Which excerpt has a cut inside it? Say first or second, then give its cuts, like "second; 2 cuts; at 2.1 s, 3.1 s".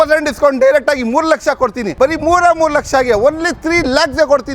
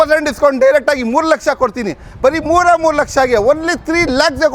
first; 1 cut; at 1.8 s